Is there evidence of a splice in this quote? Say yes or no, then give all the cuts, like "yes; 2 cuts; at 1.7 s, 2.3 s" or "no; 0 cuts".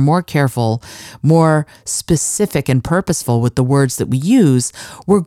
no; 0 cuts